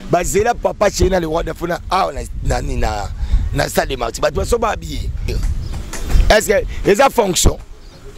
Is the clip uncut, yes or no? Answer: no